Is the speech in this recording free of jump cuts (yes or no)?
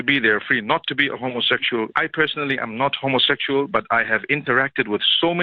no